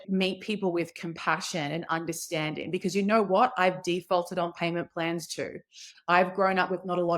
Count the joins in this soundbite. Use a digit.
1